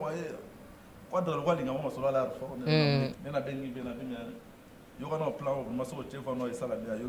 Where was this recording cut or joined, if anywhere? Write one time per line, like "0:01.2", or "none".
0:03.1